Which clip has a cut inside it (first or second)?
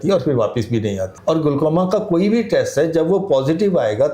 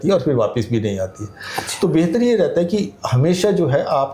first